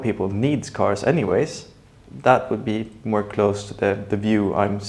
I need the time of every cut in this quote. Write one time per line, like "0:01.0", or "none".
0:01.6